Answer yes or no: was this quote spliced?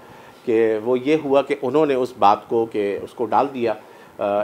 no